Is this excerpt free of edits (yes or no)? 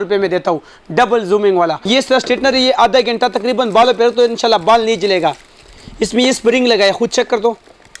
no